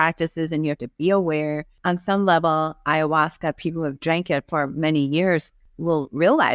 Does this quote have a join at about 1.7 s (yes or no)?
yes